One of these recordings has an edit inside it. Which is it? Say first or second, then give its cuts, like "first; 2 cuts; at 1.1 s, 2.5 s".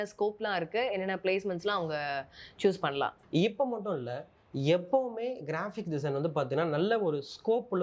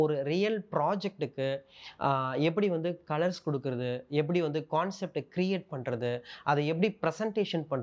first; 1 cut; at 3.2 s